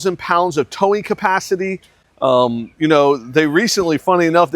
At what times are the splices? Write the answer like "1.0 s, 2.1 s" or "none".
none